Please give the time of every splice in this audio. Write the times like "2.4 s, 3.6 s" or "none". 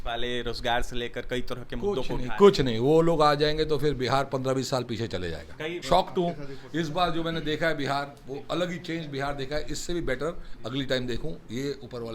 5.8 s